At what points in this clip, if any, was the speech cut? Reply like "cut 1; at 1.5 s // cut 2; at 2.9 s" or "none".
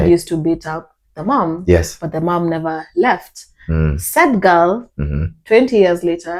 none